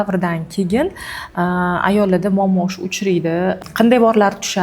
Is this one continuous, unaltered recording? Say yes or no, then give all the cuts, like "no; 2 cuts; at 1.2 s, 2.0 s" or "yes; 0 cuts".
no; 1 cut; at 3.6 s